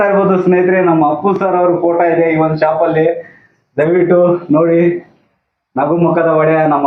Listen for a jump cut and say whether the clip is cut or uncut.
uncut